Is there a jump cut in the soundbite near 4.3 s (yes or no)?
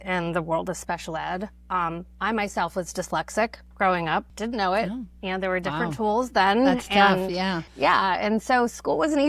yes